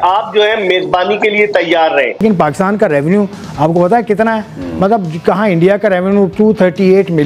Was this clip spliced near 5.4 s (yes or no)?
no